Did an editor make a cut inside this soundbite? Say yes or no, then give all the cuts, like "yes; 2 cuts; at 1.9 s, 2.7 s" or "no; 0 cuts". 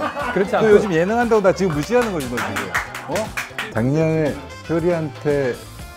yes; 1 cut; at 3.6 s